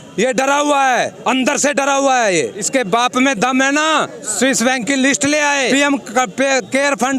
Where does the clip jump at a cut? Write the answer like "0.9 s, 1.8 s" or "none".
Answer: 2.7 s, 5.7 s